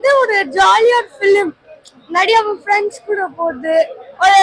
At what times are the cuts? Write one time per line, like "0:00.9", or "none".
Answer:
none